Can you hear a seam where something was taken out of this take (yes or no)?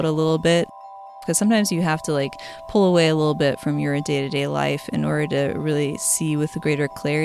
yes